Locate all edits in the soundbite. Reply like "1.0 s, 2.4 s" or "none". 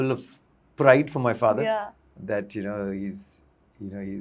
none